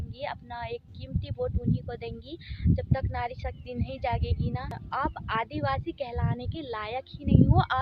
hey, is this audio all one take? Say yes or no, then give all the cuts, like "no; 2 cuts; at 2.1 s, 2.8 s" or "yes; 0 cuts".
no; 1 cut; at 4.7 s